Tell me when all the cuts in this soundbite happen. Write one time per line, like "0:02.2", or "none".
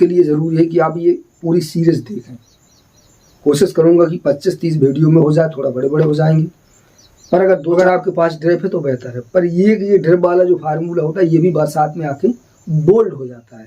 0:07.8